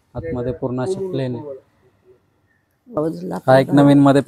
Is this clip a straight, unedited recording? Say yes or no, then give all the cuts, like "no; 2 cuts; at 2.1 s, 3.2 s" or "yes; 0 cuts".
no; 1 cut; at 3.0 s